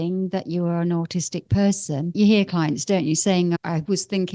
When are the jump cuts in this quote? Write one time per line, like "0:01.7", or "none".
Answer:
0:02.1
0:03.6

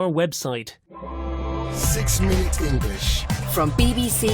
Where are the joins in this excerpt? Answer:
0:00.9
0:03.4

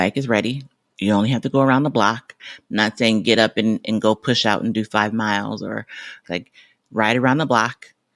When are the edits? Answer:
0:02.4
0:06.3

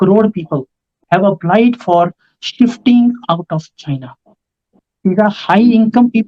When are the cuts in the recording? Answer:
0:01.0
0:04.7

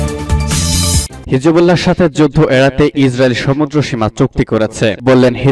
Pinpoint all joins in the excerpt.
none

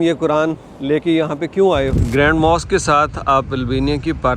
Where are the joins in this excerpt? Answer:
0:02.0

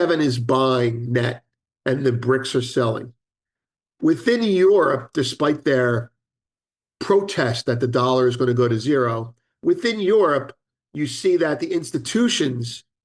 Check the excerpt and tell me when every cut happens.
none

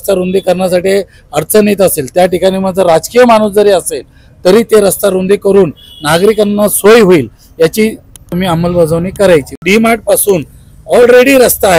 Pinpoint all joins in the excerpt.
0:08.3
0:09.6

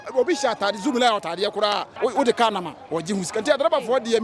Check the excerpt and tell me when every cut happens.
0:01.9

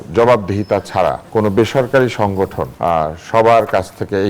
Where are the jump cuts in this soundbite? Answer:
0:01.2
0:02.7

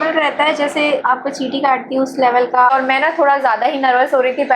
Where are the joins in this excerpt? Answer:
0:01.0
0:02.7

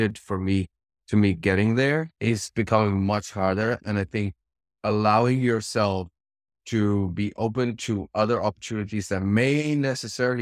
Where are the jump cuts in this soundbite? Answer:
0:02.1

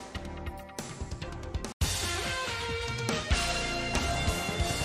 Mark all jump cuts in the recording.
none

